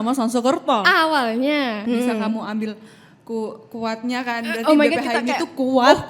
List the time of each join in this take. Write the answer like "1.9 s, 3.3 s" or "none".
1.8 s